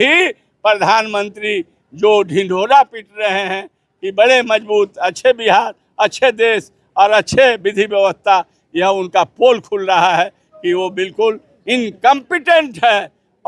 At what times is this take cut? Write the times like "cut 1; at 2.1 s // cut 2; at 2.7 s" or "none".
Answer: none